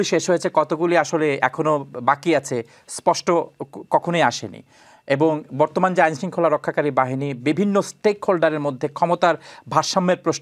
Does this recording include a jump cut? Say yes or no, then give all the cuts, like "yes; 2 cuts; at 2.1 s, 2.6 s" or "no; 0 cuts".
no; 0 cuts